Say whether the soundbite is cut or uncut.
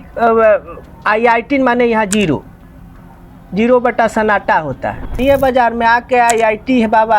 cut